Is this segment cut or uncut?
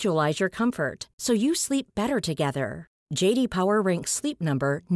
uncut